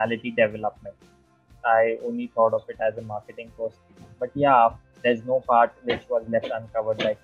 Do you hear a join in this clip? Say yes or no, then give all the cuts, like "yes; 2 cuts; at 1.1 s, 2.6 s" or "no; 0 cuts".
yes; 1 cut; at 4.9 s